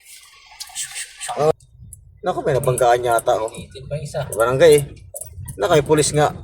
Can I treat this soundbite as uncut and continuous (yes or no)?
no